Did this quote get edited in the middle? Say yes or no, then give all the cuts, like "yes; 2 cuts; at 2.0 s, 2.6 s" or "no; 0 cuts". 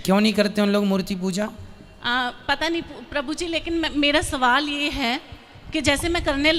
no; 0 cuts